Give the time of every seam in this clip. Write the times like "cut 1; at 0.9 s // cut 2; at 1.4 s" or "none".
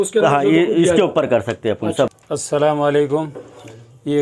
cut 1; at 2.1 s